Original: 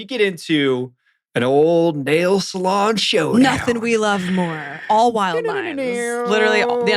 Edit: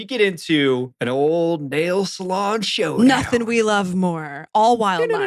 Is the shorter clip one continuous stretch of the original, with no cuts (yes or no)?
no